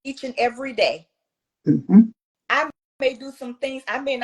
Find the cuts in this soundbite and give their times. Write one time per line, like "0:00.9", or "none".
0:02.2